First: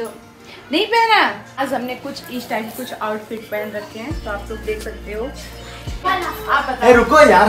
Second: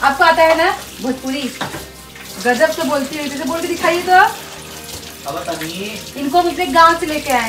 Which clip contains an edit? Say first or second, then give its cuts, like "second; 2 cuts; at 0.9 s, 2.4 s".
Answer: first; 2 cuts; at 1.6 s, 6.1 s